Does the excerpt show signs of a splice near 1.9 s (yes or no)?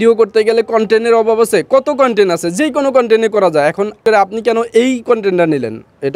no